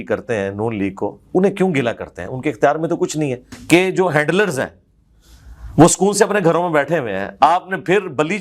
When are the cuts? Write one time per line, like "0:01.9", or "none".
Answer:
0:03.5

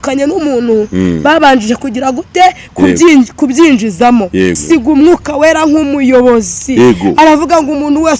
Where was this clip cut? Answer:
0:04.6

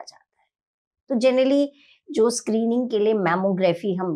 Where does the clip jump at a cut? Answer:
none

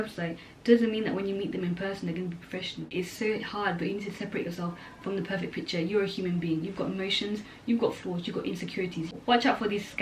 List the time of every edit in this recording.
0:02.9
0:09.1

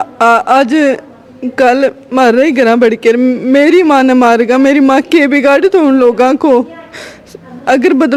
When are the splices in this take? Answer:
none

